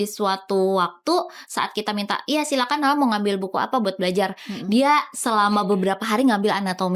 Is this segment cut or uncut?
uncut